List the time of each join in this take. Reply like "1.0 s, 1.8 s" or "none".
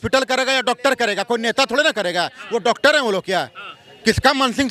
none